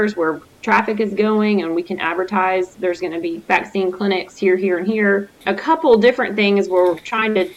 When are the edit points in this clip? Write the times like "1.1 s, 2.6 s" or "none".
5.4 s